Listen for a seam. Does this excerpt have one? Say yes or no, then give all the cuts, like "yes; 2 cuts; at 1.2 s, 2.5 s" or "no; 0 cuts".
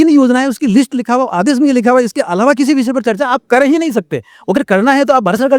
no; 0 cuts